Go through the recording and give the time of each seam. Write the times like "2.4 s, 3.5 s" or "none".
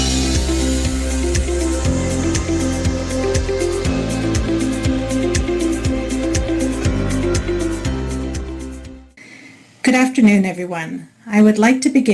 none